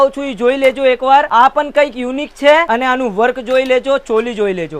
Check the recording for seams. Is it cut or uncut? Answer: uncut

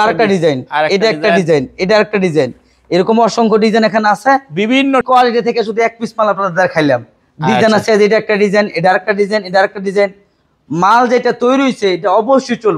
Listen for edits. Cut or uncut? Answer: cut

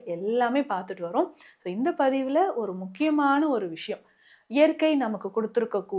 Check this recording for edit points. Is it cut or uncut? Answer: uncut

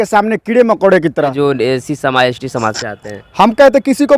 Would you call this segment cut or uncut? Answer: cut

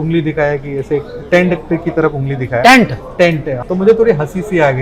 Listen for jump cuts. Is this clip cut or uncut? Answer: cut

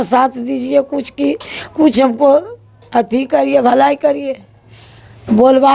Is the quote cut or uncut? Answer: uncut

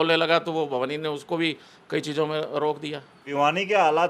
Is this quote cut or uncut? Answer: cut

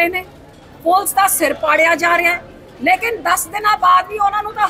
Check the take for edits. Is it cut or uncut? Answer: uncut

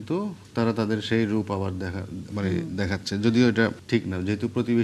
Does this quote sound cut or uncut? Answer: cut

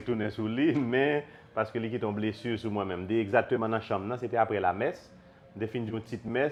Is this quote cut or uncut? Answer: uncut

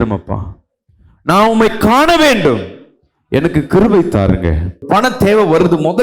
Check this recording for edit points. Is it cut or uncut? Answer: cut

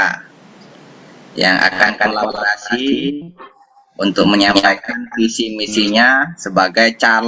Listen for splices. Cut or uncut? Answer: uncut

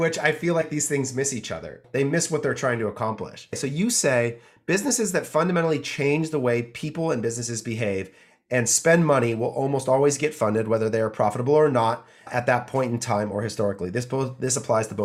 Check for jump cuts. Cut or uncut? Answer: cut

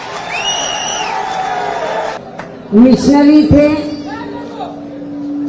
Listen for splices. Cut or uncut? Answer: cut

